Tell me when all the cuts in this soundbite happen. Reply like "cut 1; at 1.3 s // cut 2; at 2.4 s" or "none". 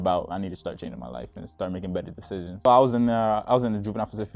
cut 1; at 2.5 s